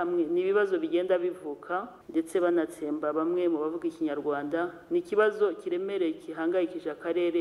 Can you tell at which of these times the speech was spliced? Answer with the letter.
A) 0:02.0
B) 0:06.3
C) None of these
A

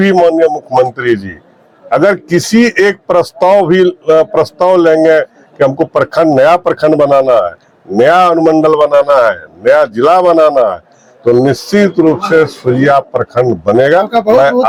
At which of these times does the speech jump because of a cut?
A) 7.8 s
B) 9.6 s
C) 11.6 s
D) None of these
D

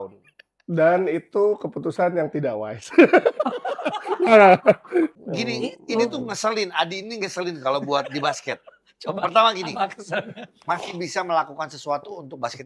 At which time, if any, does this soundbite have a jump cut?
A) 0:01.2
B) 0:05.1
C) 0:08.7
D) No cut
B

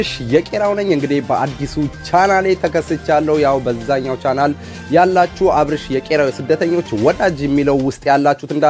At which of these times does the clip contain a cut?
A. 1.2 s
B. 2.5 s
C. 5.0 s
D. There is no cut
D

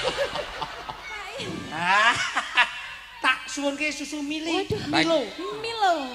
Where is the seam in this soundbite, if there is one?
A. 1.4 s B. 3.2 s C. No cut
A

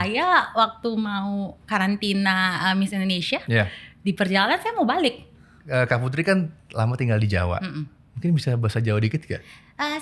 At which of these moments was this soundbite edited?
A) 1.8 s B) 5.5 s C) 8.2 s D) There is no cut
B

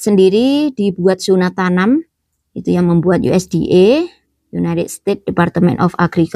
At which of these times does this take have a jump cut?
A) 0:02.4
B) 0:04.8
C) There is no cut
C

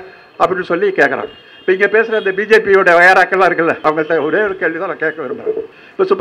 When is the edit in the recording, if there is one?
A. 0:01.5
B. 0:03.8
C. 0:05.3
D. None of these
B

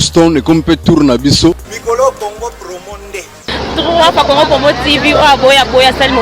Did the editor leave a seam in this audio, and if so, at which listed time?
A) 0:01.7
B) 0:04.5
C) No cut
A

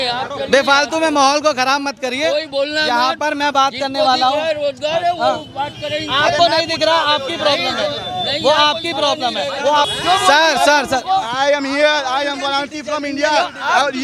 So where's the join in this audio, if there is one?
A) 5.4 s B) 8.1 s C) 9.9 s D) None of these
C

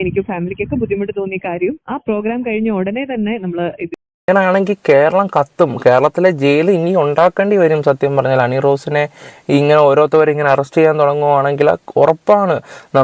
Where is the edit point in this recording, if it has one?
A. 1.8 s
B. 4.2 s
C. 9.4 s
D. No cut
B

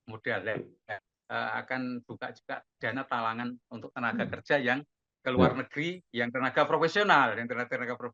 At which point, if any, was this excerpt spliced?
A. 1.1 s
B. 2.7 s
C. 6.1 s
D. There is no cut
A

